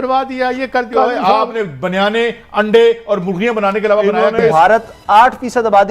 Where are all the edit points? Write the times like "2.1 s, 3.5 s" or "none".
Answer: 4.5 s